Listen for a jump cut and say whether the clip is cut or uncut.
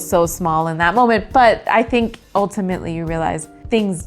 cut